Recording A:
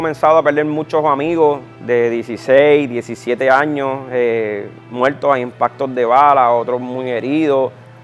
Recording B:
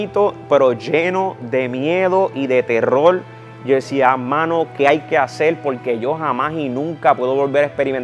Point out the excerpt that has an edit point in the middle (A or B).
A